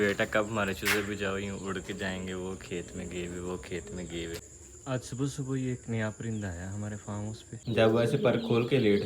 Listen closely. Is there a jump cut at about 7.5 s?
yes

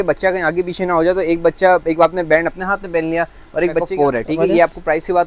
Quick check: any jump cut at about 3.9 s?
yes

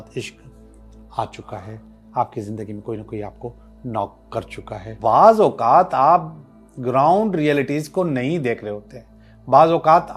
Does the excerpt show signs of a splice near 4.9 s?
yes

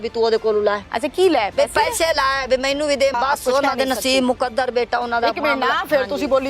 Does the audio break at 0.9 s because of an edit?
yes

